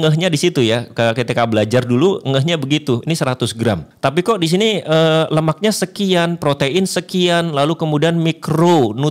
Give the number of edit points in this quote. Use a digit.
1